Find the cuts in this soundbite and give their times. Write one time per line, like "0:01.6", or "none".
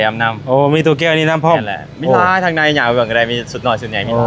none